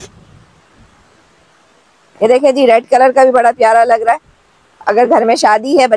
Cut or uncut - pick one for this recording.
uncut